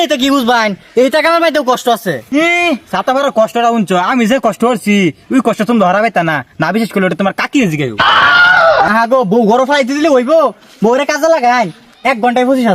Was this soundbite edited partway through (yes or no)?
yes